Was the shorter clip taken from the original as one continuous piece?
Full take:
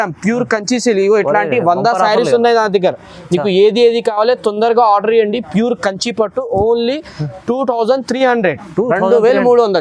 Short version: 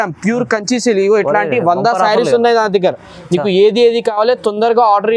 yes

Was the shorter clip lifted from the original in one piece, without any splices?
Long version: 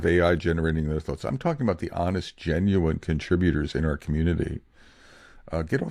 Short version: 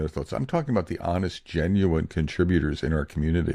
yes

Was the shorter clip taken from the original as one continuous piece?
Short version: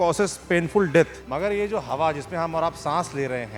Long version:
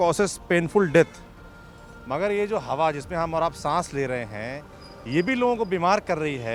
no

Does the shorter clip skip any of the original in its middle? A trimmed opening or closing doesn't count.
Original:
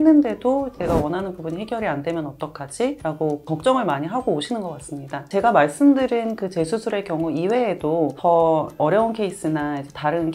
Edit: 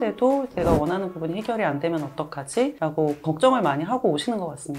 no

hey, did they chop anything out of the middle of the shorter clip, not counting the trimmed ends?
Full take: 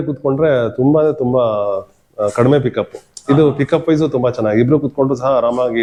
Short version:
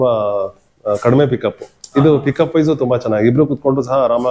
no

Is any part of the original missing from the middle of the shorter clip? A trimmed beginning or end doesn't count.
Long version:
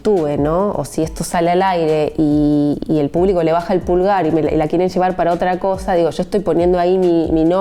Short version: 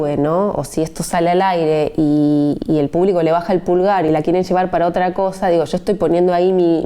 yes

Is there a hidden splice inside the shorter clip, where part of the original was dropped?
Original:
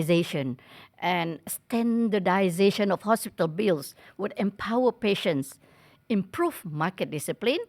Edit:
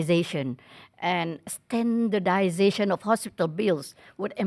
no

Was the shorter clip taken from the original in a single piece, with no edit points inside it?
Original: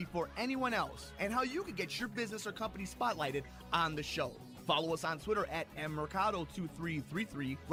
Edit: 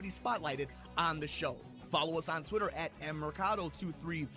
yes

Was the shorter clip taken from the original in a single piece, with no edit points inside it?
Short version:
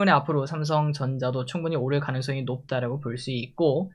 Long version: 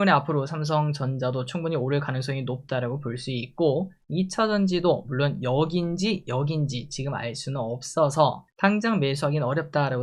yes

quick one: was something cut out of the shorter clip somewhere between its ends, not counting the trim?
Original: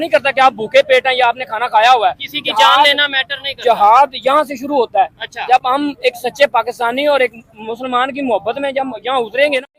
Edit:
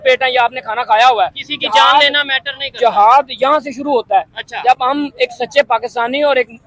no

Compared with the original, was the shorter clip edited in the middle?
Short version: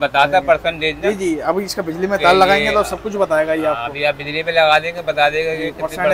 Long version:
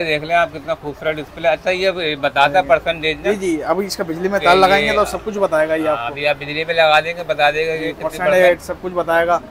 no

